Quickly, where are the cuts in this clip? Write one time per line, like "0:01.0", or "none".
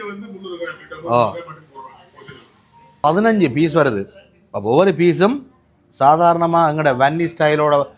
0:03.0